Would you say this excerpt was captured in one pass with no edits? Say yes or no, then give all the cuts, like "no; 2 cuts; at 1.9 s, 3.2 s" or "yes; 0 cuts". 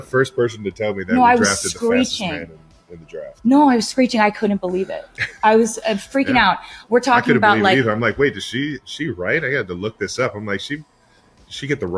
yes; 0 cuts